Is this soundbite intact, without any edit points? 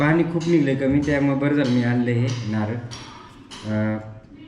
yes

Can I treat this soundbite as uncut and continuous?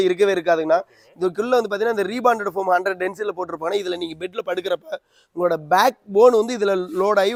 yes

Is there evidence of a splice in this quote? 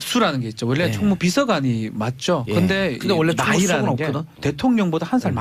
no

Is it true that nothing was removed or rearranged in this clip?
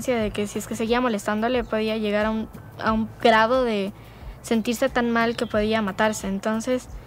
yes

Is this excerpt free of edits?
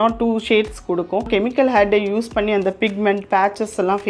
no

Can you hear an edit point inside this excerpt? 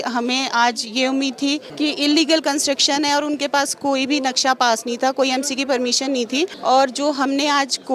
yes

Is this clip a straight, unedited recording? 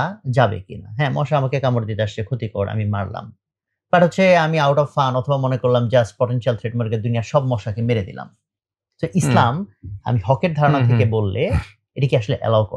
yes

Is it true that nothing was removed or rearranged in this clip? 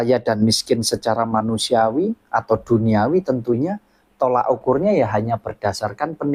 yes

